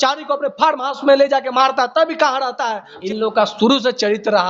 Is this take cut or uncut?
cut